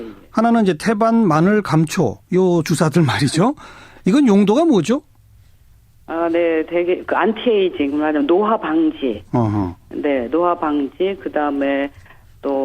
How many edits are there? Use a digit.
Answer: 1